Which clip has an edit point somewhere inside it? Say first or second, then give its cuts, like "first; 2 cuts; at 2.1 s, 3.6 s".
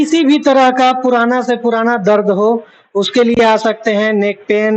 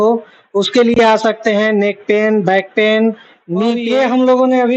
second; 1 cut; at 3.8 s